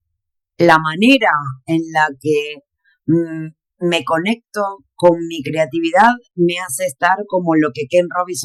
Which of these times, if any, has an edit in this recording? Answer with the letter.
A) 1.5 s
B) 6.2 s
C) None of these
C